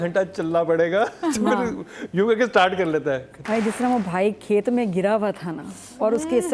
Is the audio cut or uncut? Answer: cut